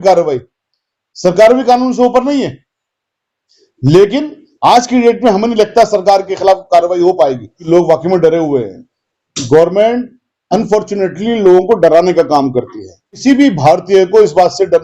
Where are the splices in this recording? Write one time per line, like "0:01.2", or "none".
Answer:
0:07.6
0:13.1